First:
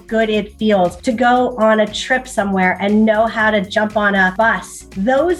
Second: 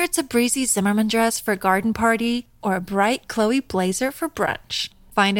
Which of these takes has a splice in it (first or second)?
first